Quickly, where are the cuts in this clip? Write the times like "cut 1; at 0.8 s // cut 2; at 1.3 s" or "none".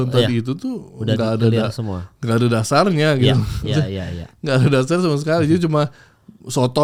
none